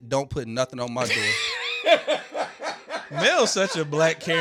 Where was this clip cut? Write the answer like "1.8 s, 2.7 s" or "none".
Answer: none